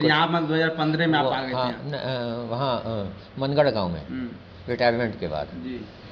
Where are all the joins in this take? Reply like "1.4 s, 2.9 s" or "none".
none